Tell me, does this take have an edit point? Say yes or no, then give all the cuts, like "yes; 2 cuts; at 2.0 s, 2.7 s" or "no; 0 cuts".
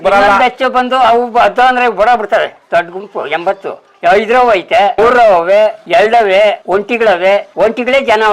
yes; 4 cuts; at 4.9 s, 5.8 s, 6.6 s, 7.5 s